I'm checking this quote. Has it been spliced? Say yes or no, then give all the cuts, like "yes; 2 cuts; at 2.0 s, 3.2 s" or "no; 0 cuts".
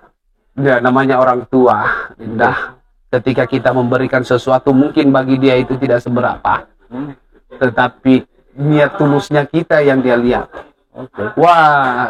no; 0 cuts